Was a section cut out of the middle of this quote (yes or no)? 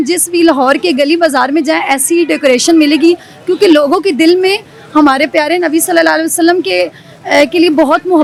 no